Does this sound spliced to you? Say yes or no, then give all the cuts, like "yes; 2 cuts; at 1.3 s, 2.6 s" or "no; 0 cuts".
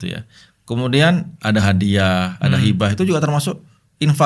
no; 0 cuts